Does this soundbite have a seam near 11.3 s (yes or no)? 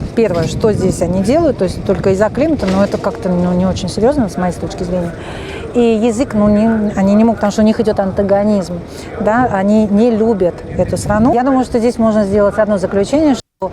yes